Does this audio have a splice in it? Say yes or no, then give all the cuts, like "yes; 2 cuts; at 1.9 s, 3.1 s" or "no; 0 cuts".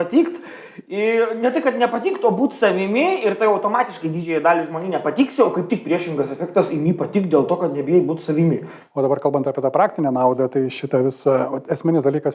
yes; 1 cut; at 8.8 s